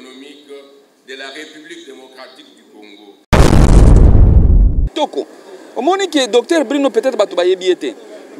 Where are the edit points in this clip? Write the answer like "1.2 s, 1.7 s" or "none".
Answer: 3.2 s, 4.9 s